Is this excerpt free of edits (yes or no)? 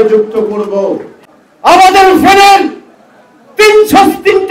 no